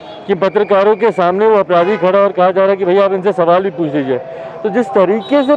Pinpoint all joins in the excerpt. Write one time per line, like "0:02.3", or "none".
none